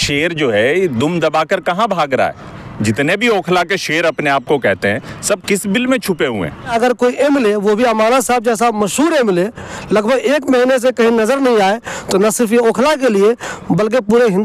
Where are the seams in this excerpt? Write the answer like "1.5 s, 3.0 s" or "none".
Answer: 2.5 s, 6.7 s